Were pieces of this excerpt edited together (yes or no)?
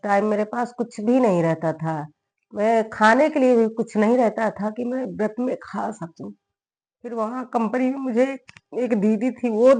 no